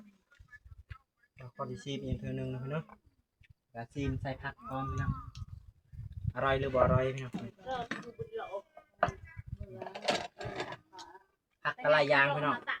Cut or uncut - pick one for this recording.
uncut